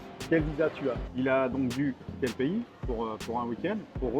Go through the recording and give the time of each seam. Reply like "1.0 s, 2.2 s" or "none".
1.0 s, 2.1 s